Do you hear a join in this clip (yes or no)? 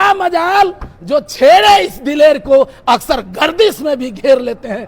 no